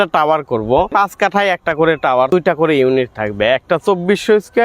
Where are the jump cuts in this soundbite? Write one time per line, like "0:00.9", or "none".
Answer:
0:00.9
0:02.3